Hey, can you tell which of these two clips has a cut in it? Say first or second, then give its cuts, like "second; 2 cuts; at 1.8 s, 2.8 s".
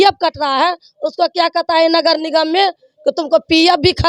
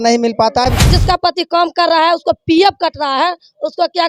second; 1 cut; at 1.0 s